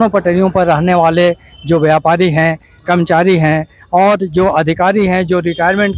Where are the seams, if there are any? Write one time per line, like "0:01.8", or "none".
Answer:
none